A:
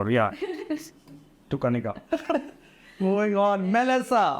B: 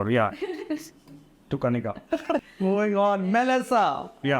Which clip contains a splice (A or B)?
B